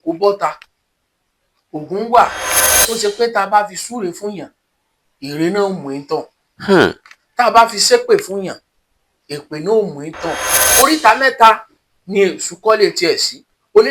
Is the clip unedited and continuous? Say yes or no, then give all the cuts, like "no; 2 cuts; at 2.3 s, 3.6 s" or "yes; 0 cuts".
no; 2 cuts; at 2.6 s, 10.6 s